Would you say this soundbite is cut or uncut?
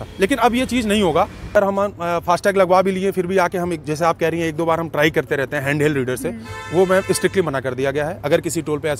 cut